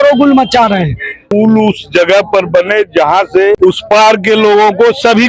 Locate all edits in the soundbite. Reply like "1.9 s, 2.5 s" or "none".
1.2 s, 3.6 s